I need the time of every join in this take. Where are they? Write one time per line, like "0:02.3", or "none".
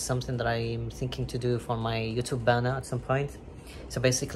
none